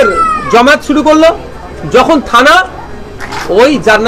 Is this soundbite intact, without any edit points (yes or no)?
yes